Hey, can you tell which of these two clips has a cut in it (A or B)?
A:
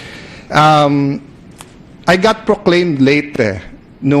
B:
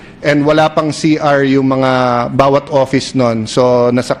A